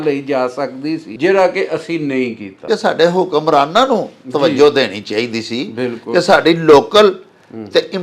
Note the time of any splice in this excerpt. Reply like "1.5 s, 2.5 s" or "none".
1.1 s, 2.7 s